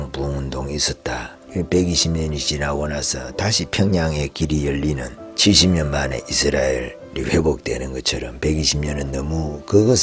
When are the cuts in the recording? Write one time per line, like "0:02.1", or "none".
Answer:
none

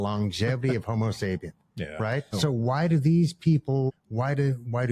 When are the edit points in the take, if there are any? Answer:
0:02.3
0:03.9

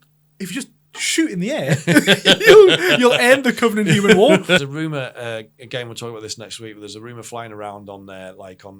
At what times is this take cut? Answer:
0:04.6

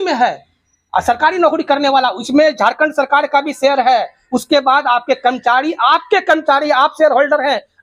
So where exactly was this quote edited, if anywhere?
none

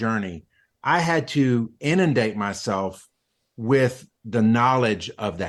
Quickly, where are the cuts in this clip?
none

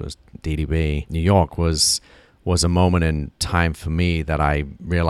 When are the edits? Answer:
0:01.1

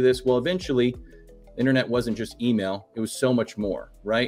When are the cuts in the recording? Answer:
none

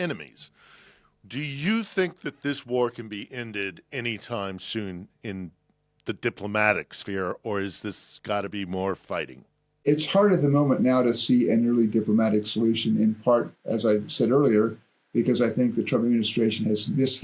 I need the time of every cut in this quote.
0:09.7

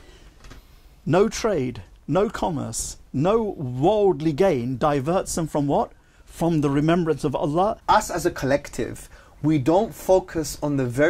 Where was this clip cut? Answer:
0:07.8

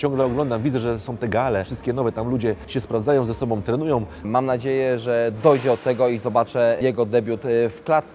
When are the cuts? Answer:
0:01.7
0:02.6
0:04.3
0:06.8

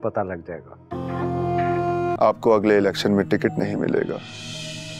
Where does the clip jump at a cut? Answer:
0:02.2

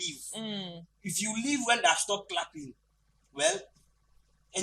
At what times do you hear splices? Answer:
none

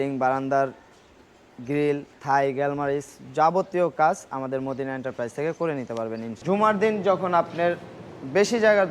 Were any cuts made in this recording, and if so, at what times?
0:02.1
0:06.3

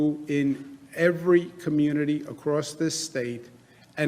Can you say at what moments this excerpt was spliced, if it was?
none

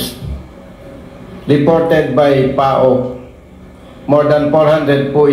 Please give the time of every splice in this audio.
none

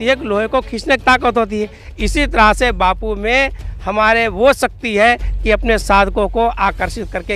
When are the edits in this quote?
none

